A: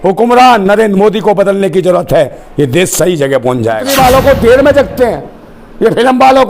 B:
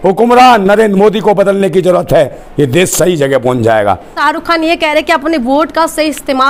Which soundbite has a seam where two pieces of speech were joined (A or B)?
A